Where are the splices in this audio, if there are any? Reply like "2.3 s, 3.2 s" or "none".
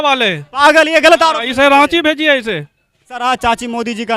3.2 s